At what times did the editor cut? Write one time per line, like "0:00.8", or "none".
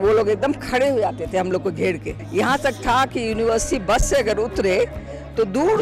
0:02.1